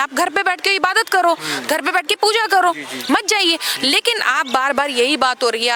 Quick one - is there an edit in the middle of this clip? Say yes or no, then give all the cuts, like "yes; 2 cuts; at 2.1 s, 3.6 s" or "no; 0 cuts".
no; 0 cuts